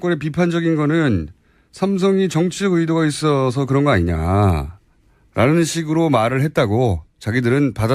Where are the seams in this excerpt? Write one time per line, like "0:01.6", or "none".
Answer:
0:03.0